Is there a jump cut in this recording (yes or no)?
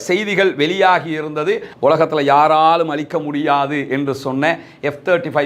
yes